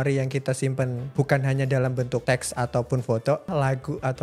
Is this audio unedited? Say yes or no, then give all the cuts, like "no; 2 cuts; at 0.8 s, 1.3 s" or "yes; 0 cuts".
no; 3 cuts; at 1.0 s, 2.2 s, 3.5 s